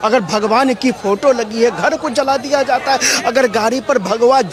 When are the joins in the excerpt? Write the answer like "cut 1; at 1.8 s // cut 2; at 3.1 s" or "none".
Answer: none